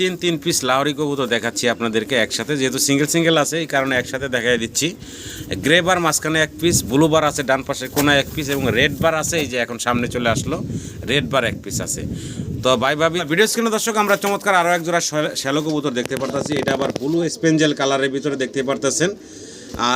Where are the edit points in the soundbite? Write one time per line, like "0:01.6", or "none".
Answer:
0:13.2